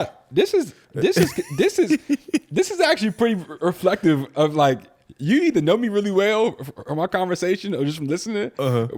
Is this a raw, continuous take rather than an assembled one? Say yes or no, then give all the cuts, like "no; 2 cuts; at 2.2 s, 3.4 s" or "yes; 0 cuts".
yes; 0 cuts